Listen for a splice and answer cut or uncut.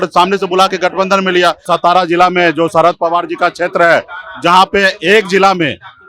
cut